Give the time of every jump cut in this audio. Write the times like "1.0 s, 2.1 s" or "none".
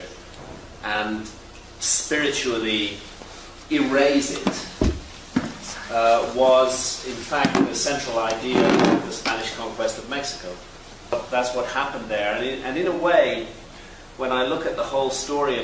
8.8 s